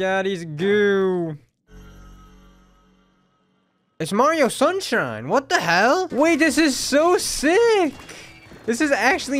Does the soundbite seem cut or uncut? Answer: cut